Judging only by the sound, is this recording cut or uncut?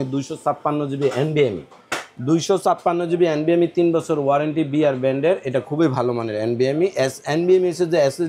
uncut